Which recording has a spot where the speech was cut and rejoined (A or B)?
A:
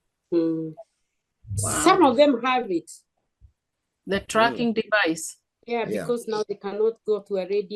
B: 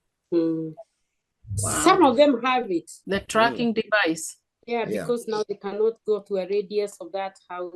B